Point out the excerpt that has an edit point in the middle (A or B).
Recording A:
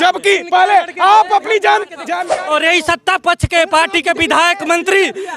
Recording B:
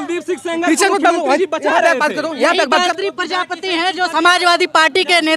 A